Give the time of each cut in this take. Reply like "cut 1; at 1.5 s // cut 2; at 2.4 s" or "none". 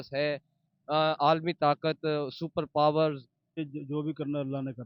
cut 1; at 3.6 s